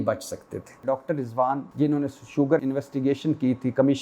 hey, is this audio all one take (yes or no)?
no